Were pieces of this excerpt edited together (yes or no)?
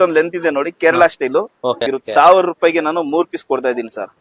yes